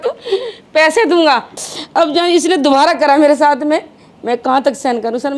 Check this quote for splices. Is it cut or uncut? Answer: cut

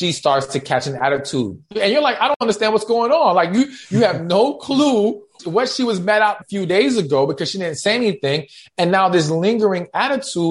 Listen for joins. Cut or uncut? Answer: cut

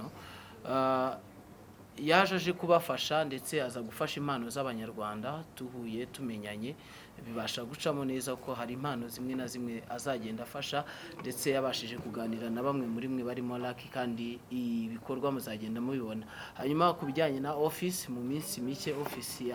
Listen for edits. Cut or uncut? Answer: uncut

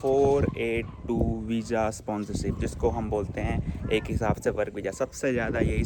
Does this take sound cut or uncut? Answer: uncut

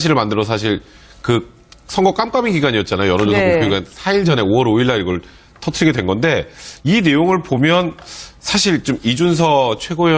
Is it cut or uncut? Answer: cut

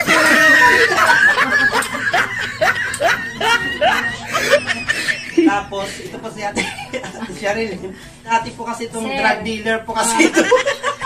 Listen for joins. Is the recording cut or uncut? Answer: cut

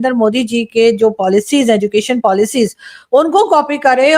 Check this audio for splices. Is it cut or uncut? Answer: uncut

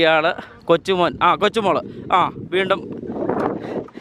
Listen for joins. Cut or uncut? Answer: uncut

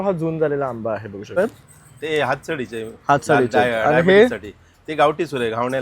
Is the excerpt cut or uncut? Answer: cut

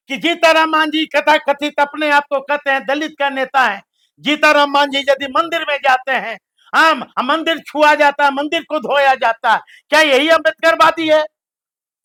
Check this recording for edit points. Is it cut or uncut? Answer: uncut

